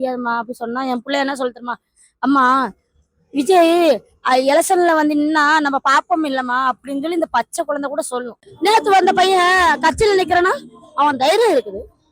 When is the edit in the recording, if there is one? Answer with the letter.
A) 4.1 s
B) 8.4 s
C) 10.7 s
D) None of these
B